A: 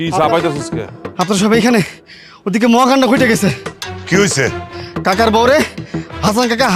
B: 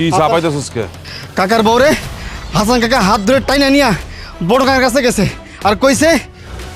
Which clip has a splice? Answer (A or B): B